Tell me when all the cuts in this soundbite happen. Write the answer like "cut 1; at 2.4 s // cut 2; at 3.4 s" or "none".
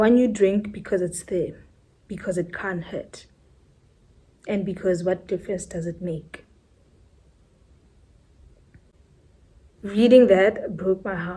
cut 1; at 8.9 s